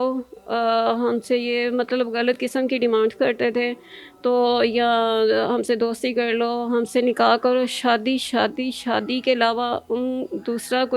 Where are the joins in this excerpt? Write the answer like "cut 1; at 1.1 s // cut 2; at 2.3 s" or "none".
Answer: none

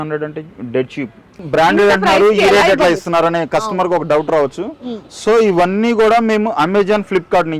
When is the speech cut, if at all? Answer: cut 1; at 1.3 s

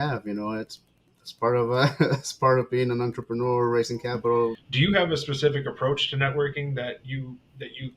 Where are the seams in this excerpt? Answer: cut 1; at 4.6 s

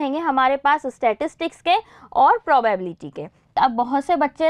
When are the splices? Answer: cut 1; at 3.5 s

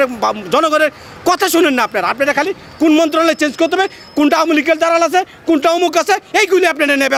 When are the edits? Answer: none

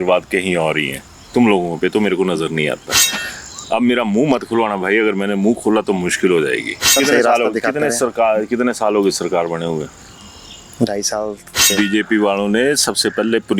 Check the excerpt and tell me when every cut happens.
cut 1; at 7.0 s // cut 2; at 11.7 s

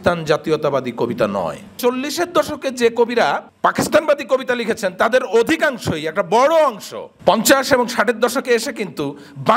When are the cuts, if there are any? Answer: cut 1; at 1.7 s // cut 2; at 3.5 s

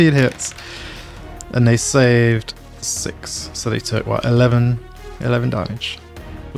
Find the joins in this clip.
none

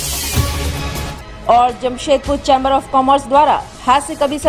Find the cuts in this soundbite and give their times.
cut 1; at 1.0 s

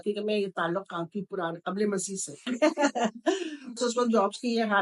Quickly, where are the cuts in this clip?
cut 1; at 2.4 s // cut 2; at 3.8 s

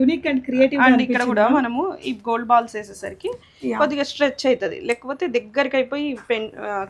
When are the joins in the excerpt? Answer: none

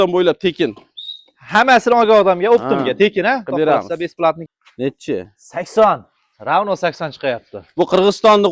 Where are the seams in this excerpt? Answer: cut 1; at 4.5 s

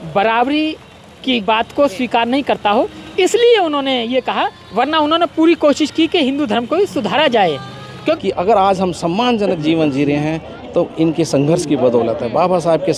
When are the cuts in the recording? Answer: cut 1; at 8.2 s

